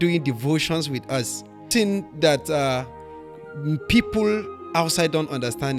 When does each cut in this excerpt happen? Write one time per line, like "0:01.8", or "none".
0:01.7